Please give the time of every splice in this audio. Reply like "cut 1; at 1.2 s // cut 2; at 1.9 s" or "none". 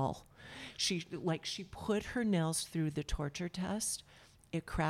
none